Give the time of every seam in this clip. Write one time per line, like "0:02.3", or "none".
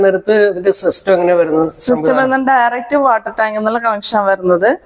none